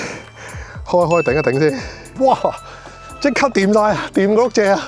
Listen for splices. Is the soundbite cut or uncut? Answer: uncut